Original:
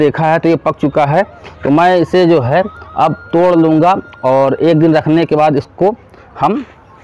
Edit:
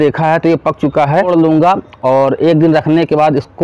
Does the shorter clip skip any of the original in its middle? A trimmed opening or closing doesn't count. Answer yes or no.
yes